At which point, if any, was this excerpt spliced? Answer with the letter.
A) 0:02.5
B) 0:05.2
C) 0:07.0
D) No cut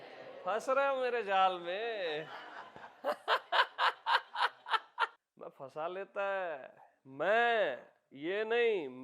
B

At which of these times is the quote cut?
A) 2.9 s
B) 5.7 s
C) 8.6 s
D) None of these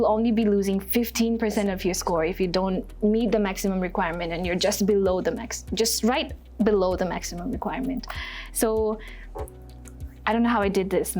D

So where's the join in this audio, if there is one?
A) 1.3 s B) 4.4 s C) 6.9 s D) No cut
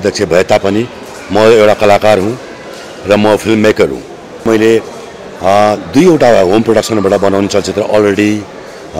B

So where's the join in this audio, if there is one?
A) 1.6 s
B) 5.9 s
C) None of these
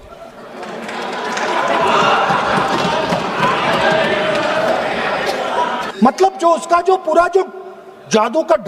B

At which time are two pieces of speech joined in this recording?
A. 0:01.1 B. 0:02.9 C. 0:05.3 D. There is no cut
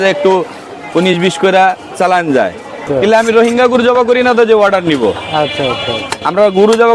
B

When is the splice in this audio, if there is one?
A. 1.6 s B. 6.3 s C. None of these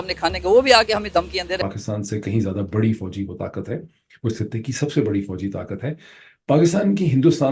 A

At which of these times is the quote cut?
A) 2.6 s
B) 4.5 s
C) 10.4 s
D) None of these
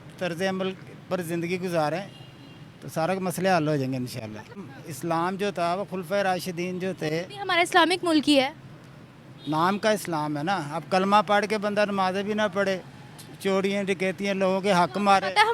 B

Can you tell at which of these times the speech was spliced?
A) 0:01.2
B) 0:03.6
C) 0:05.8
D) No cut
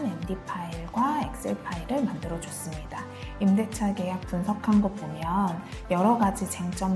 D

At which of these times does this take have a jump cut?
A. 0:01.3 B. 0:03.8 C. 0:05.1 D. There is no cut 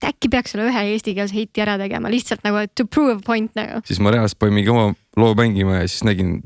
B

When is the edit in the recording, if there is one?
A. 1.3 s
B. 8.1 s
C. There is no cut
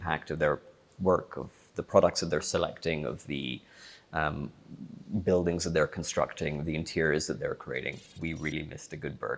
B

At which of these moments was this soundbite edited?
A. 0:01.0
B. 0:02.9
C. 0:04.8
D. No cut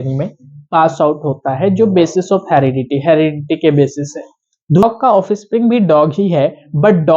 C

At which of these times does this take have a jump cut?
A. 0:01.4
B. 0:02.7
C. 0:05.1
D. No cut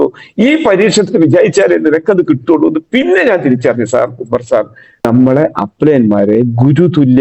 C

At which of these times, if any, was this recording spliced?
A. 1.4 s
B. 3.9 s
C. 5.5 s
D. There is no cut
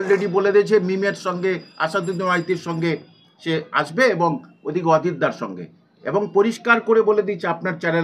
D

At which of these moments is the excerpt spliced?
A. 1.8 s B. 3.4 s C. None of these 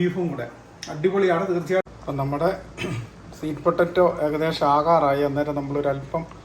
A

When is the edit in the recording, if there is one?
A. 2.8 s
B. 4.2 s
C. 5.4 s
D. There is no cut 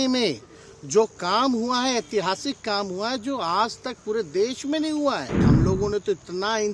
C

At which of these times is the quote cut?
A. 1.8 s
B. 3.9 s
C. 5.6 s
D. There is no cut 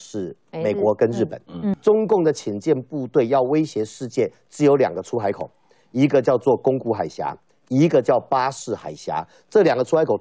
A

